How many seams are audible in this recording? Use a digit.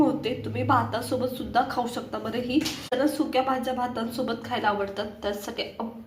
1